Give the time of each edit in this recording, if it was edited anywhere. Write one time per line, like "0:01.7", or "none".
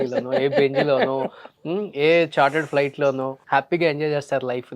0:03.3